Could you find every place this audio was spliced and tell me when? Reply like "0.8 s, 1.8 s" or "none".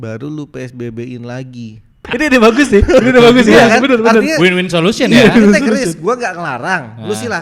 2.0 s